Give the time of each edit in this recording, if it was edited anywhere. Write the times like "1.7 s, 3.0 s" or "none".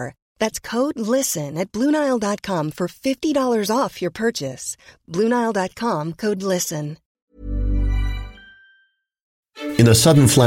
7.1 s, 9.4 s